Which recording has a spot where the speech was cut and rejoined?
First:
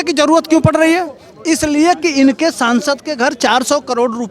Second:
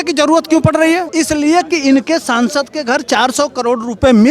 second; 1 cut; at 1.1 s

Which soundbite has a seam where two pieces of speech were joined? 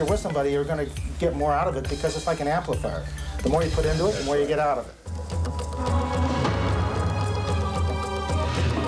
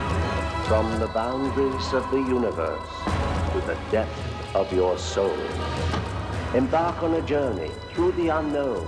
second; 1 cut; at 5.8 s

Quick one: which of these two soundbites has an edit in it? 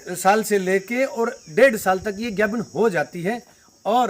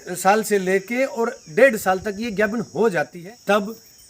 second; 1 cut; at 3.2 s

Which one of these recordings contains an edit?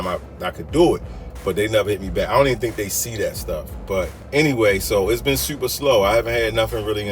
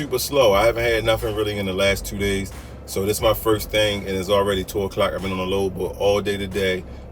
first; 1 cut; at 4.2 s

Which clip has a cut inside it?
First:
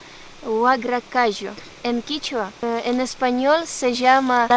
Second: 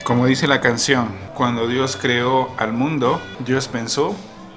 second; 2 cuts; at 1.2 s, 3.3 s

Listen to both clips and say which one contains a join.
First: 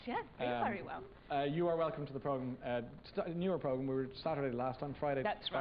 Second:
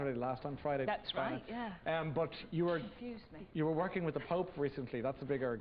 first; 1 cut; at 1.3 s

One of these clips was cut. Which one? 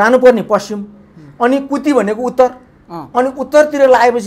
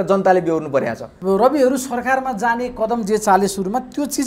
second; 1 cut; at 1.2 s

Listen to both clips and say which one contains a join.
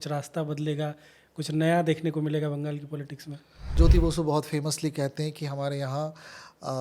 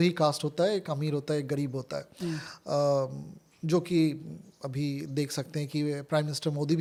first; 1 cut; at 3.8 s

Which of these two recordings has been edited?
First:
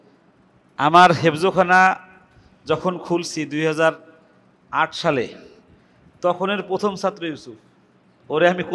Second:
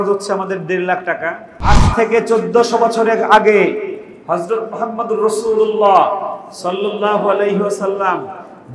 second; 1 cut; at 1.8 s

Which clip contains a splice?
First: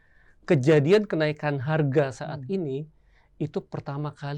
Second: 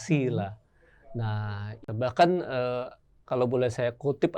second; 1 cut; at 1.7 s

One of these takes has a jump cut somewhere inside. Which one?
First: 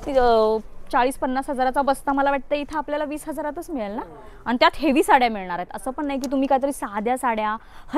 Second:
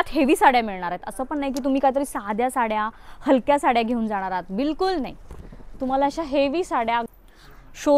second; 1 cut; at 7.1 s

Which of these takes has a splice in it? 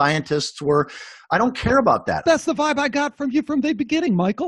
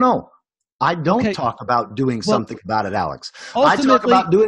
first; 1 cut; at 2.2 s

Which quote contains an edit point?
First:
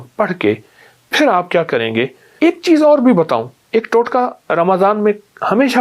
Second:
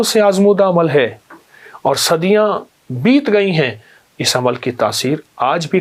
first; 1 cut; at 2.2 s

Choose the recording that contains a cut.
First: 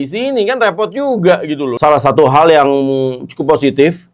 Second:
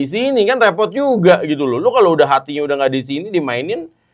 first; 1 cut; at 1.7 s

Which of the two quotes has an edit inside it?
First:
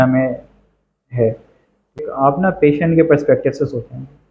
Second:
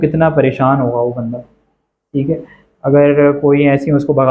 first; 1 cut; at 2.0 s

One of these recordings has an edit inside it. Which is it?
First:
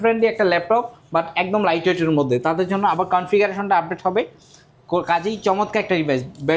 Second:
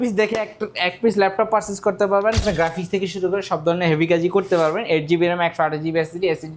second; 1 cut; at 2.4 s

